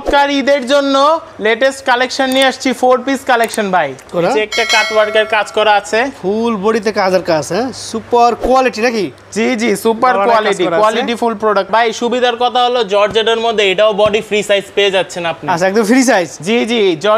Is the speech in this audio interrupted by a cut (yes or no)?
yes